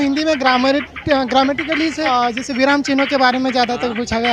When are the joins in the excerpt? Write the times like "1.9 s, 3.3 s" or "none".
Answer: 2.0 s

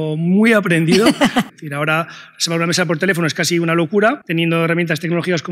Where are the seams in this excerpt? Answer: 1.5 s, 4.2 s

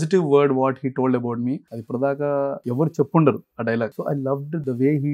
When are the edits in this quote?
1.7 s, 2.6 s, 4.0 s

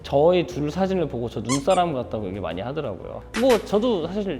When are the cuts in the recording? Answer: 3.1 s

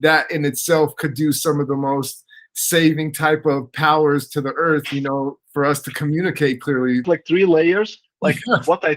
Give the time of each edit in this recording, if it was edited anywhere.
7.0 s

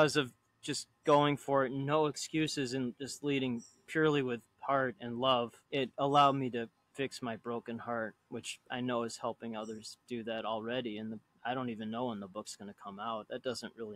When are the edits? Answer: 5.6 s, 6.8 s

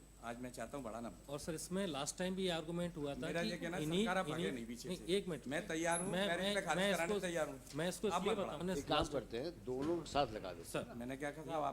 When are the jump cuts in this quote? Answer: 8.6 s

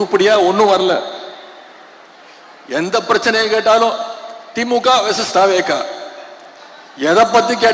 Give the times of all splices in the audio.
none

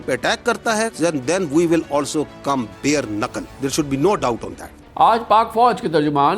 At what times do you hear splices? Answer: none

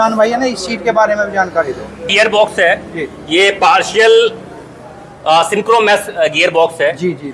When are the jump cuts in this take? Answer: 2.1 s

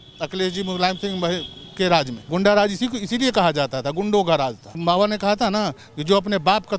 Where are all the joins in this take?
2.2 s, 4.8 s

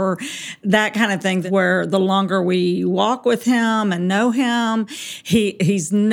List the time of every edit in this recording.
1.4 s

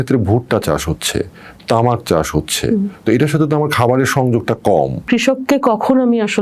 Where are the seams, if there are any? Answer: 5.0 s

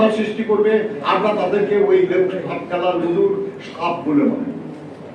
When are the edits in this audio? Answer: none

